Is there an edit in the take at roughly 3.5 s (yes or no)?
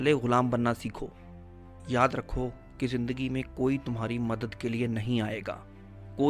no